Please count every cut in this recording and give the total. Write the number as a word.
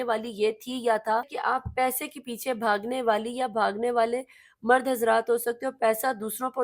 one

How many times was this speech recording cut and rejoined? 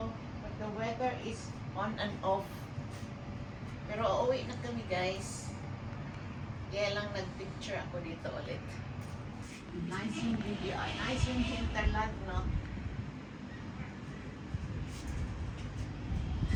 zero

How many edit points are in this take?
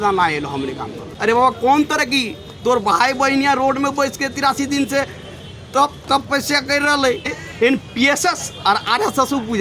two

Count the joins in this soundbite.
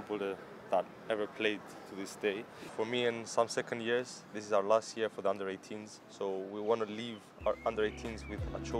one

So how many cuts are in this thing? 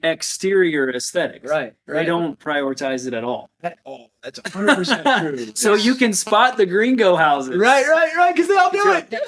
zero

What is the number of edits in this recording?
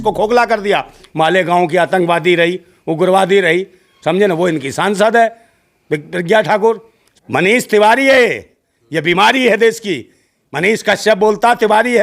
two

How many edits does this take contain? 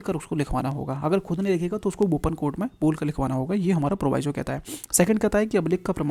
zero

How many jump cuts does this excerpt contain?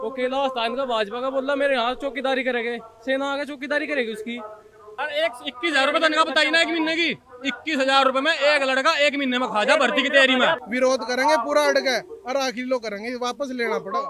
two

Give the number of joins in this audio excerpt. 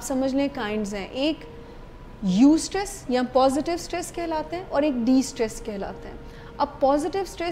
zero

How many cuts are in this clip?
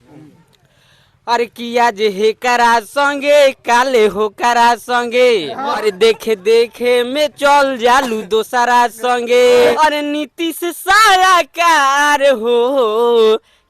two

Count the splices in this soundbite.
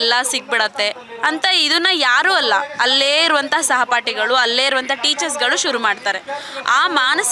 zero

